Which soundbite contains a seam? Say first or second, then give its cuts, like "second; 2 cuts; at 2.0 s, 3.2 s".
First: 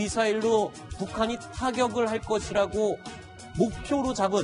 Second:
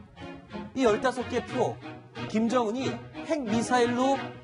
first; 1 cut; at 1.7 s